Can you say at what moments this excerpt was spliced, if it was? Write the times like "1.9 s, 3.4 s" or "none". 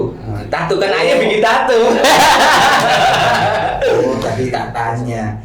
4.0 s